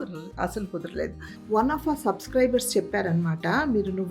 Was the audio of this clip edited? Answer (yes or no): yes